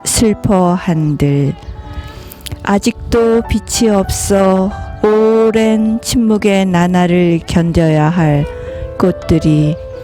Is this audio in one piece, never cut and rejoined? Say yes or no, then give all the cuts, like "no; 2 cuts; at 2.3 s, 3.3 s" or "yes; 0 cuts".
yes; 0 cuts